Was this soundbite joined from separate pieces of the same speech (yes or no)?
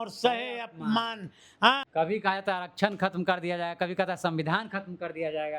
yes